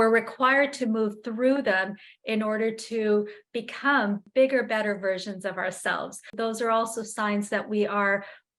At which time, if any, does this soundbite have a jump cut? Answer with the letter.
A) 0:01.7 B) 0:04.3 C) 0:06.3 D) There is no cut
C